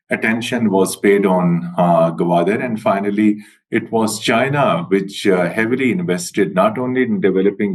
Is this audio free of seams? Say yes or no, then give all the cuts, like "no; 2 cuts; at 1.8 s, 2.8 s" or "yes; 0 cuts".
yes; 0 cuts